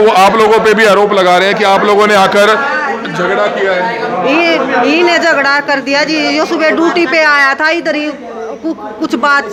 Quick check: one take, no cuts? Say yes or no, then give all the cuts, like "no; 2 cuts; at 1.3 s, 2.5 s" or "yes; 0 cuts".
yes; 0 cuts